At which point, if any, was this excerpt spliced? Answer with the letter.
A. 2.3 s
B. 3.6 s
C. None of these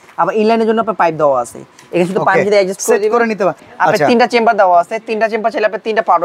B